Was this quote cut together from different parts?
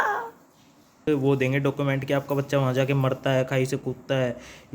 yes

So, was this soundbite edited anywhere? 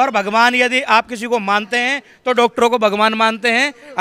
no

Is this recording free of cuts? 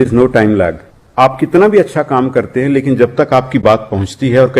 no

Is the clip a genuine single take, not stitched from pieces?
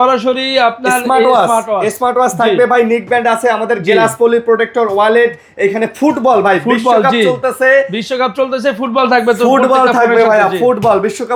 yes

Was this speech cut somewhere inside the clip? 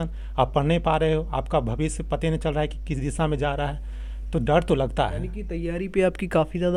no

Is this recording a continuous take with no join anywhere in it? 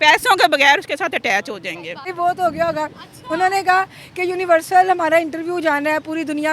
no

